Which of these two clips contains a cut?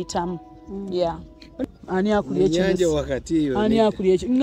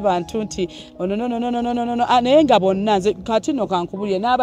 first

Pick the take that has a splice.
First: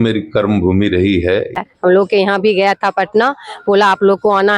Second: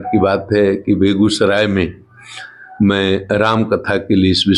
first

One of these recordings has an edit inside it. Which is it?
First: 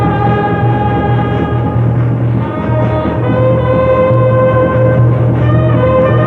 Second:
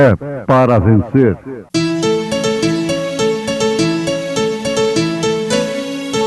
second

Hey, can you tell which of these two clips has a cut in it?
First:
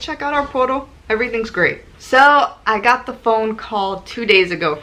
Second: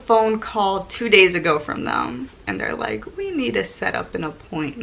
first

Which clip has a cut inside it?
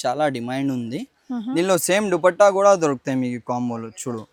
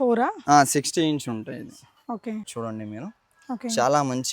second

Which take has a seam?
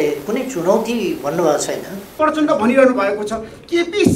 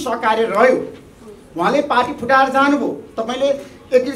first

